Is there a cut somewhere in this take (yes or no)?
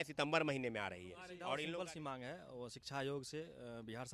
yes